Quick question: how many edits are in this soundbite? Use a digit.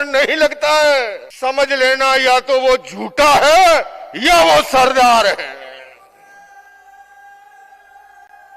1